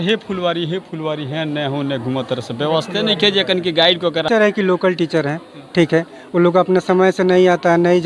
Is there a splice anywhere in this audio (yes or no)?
yes